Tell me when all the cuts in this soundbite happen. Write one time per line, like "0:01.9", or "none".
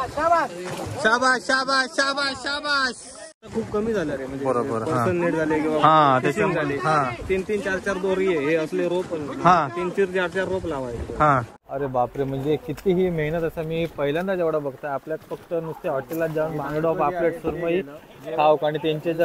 0:03.5
0:11.6